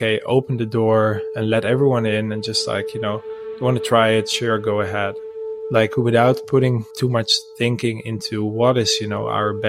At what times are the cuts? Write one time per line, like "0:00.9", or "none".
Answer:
0:05.3
0:06.9